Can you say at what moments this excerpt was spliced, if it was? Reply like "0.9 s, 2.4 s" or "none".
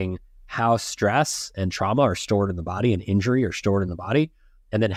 none